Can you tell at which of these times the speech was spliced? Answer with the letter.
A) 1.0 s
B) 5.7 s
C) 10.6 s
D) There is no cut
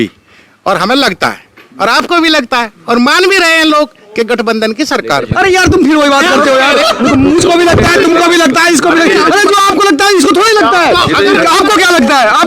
A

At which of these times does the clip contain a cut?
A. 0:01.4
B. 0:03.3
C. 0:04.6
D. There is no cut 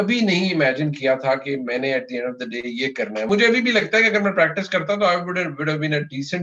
B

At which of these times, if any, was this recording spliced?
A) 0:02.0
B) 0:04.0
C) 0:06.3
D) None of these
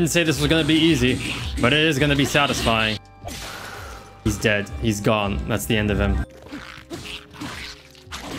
C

